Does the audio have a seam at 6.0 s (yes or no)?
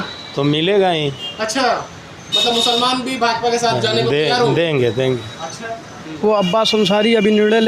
yes